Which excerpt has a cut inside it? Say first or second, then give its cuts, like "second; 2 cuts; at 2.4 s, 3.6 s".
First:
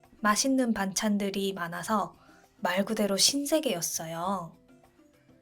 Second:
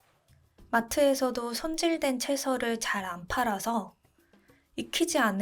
first; 1 cut; at 4.5 s